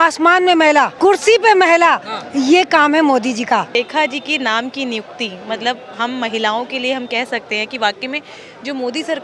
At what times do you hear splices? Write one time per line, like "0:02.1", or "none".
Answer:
0:00.9
0:03.7